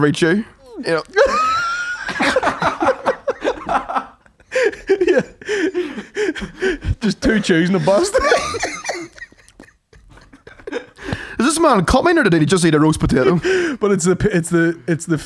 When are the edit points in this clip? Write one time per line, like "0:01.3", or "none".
none